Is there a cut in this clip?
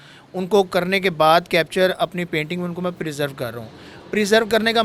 no; 0 cuts

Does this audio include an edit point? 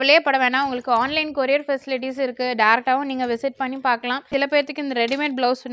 yes; 1 cut; at 4.3 s

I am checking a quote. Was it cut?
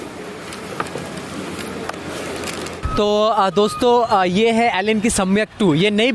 no; 0 cuts

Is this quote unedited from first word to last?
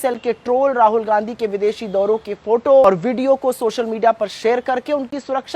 no; 1 cut; at 2.8 s

